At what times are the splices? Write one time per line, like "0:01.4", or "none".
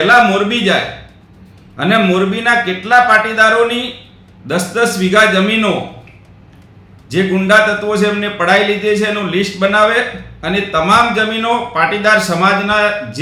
none